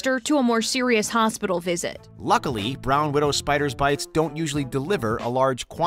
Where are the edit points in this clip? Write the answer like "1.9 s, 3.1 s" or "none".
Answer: none

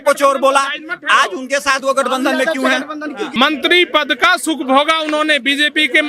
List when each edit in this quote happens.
3.3 s

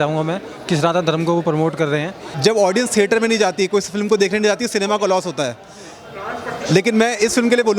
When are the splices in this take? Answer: 2.2 s

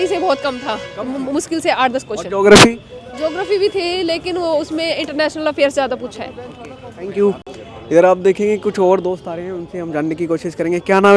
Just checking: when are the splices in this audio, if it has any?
none

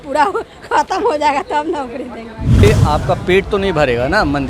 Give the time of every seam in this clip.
2.6 s

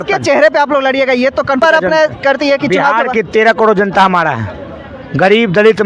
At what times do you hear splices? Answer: 1.6 s

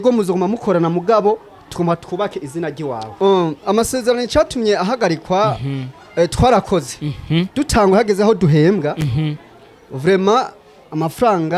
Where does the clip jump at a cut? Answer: 3.1 s

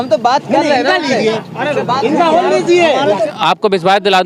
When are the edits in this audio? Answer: 3.2 s

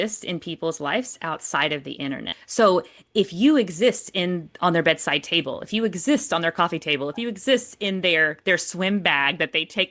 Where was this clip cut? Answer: 2.4 s

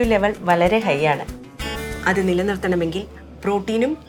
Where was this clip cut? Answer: none

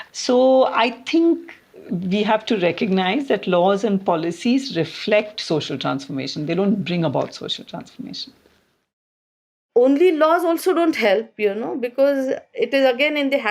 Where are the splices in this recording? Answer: 9.6 s

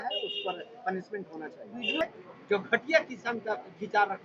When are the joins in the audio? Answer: 2.0 s

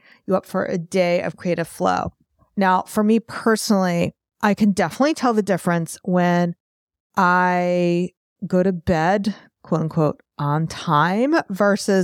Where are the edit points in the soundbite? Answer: none

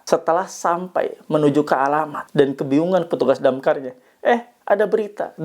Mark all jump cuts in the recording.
2.2 s

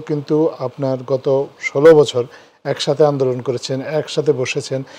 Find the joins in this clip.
none

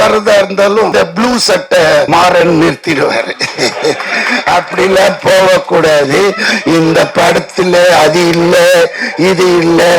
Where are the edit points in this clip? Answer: 0.9 s, 2.1 s

